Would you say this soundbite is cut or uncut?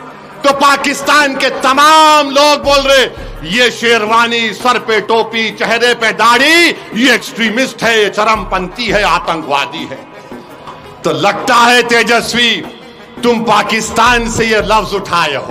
uncut